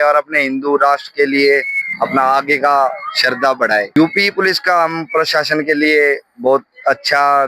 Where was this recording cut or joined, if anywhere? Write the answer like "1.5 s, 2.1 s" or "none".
3.9 s